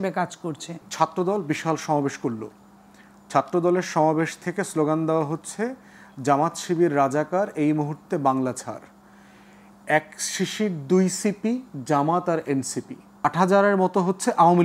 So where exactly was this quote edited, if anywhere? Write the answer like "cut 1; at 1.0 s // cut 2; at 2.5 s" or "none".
cut 1; at 0.9 s // cut 2; at 13.3 s